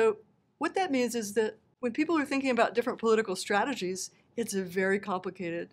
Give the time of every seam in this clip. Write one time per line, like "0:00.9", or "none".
0:01.7